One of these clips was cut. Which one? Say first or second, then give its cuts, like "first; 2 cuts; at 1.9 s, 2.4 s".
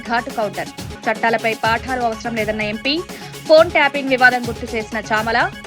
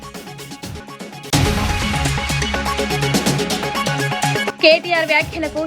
second; 2 cuts; at 1.1 s, 4.5 s